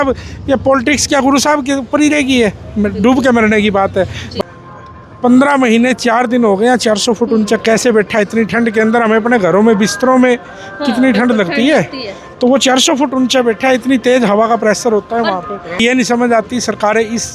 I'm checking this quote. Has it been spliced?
yes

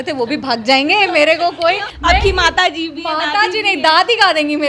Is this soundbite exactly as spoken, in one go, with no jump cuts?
no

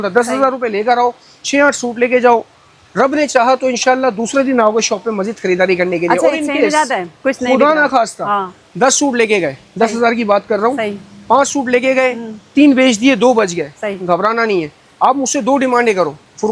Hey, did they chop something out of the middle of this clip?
no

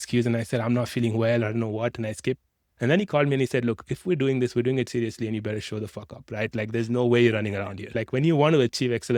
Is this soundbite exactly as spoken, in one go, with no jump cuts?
no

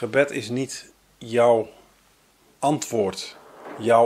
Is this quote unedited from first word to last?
yes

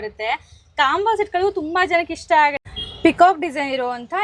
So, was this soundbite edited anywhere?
yes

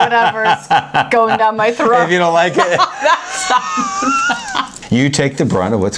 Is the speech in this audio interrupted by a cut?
yes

